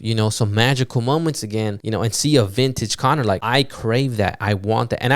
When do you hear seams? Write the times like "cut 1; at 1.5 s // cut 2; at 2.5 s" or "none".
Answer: cut 1; at 1.8 s // cut 2; at 3.4 s